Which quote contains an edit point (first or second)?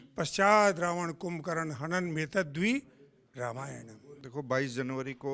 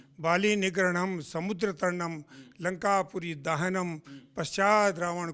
first